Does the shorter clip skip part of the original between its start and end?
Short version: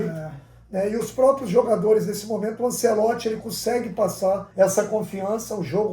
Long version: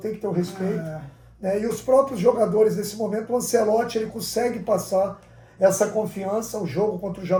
yes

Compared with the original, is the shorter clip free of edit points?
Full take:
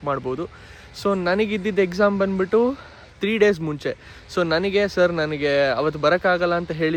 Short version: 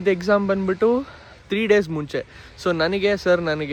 yes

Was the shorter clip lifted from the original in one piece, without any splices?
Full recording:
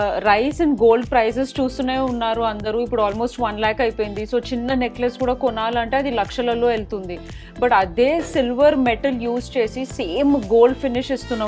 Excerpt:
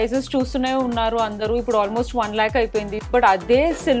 no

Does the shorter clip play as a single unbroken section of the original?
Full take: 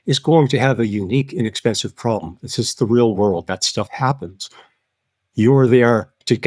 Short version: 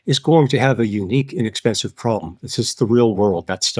yes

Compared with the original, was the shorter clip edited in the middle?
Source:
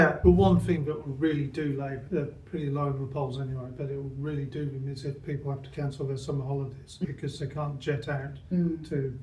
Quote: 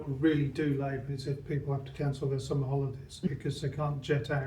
yes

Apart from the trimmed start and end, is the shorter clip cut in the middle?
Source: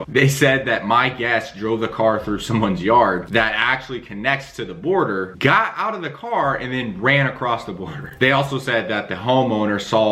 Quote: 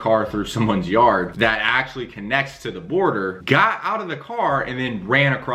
no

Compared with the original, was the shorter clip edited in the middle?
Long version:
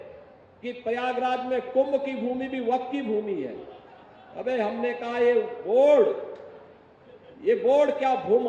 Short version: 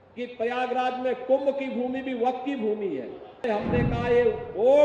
yes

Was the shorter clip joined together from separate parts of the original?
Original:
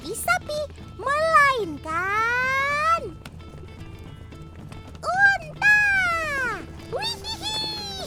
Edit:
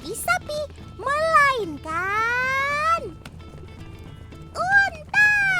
yes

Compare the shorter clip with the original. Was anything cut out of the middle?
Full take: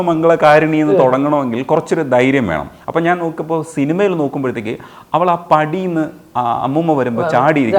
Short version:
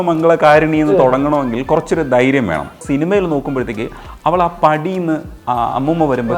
yes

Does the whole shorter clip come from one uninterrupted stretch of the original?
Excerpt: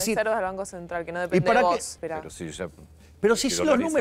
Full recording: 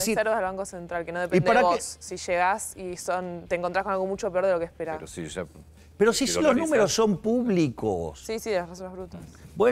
no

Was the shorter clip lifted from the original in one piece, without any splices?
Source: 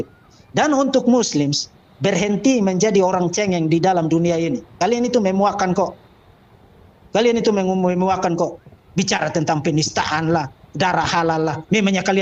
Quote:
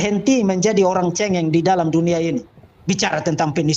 no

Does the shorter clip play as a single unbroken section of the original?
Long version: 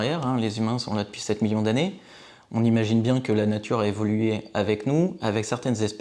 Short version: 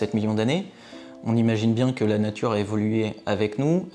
yes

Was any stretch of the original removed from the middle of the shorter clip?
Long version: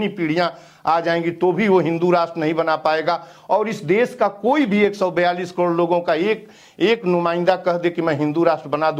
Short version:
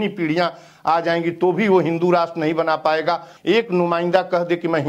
yes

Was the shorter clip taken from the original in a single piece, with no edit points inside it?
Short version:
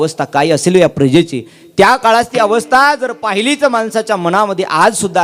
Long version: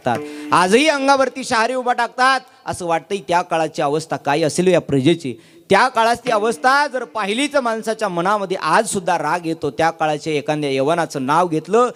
yes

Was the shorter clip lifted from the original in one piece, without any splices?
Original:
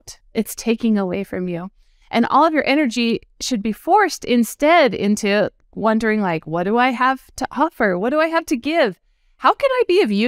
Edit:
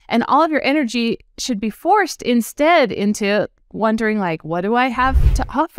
yes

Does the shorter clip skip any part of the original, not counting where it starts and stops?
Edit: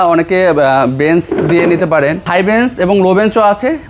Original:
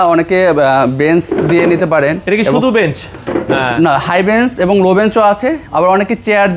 yes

